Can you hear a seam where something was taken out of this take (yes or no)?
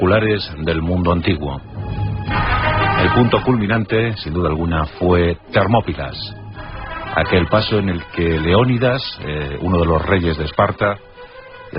yes